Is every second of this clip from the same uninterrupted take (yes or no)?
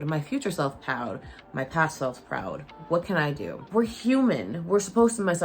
no